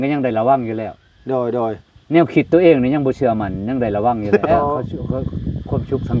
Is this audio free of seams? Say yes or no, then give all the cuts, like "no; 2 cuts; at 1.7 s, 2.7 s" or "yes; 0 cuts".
no; 1 cut; at 4.5 s